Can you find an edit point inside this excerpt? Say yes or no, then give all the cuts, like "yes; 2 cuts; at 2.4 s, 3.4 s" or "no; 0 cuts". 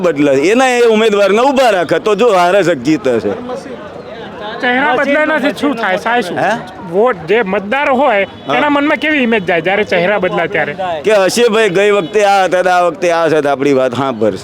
no; 0 cuts